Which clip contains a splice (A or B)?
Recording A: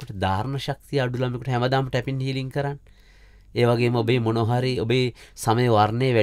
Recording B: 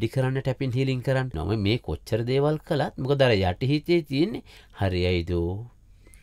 B